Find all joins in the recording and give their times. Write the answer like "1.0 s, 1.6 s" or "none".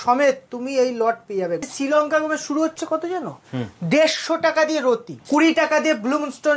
1.6 s, 5.1 s